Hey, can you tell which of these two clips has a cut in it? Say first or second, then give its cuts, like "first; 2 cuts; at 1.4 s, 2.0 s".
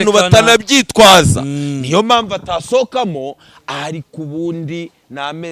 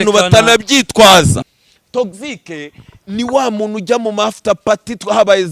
second; 1 cut; at 1.5 s